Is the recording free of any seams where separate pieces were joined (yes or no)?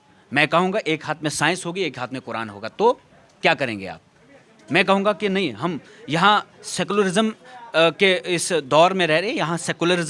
yes